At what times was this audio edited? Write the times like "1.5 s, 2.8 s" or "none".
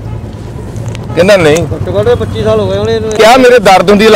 3.2 s

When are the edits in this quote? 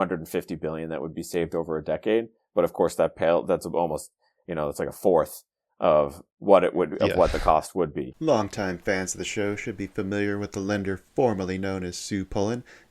8.1 s

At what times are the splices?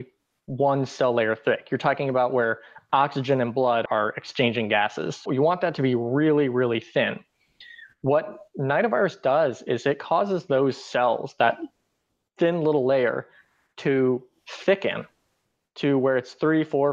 3.8 s, 5.2 s

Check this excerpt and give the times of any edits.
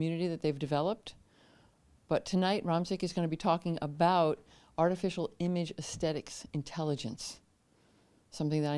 7.2 s

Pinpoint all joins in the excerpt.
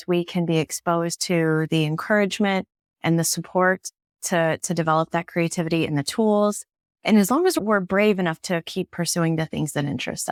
none

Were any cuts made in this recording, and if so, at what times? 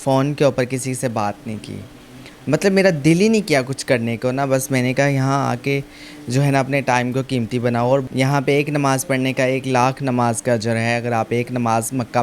8.1 s

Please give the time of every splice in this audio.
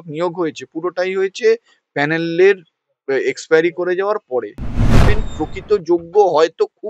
5.0 s

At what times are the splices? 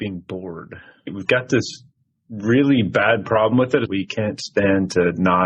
1.2 s, 3.9 s

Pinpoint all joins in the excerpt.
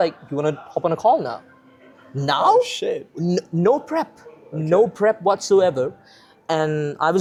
none

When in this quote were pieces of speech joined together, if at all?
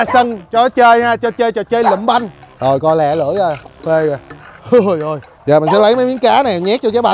2.4 s, 5.3 s

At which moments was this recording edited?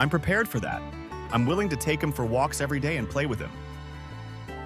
3.5 s

